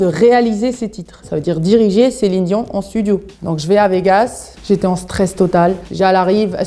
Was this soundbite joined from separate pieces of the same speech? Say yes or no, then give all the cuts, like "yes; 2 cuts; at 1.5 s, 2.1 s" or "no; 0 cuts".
no; 0 cuts